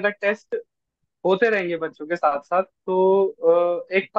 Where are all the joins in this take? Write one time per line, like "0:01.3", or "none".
none